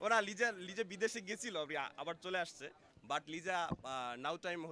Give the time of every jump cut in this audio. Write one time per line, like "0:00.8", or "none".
none